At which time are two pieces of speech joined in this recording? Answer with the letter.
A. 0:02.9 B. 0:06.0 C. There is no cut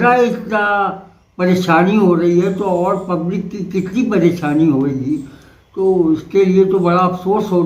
C